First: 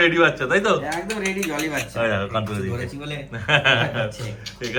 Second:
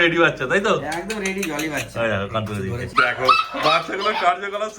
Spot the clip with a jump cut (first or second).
second